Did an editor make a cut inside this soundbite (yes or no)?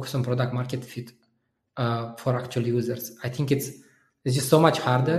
no